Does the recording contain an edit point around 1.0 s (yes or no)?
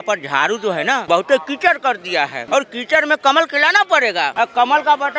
yes